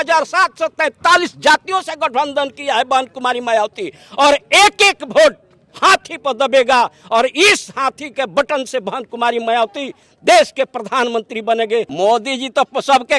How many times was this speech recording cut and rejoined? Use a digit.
1